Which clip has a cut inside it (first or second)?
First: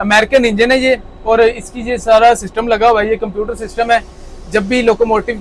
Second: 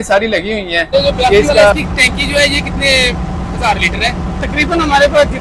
second